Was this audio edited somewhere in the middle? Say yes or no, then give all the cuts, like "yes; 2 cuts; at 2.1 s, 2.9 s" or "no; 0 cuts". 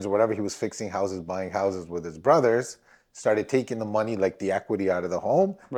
no; 0 cuts